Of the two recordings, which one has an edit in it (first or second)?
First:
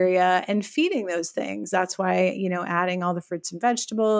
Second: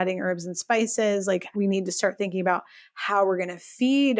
second